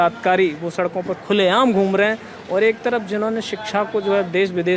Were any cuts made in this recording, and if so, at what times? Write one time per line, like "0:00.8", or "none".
none